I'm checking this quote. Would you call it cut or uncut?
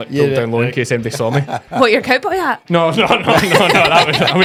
uncut